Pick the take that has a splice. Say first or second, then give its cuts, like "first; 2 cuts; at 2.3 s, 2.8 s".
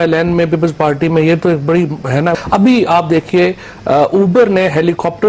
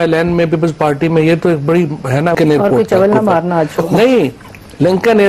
second; 1 cut; at 2.4 s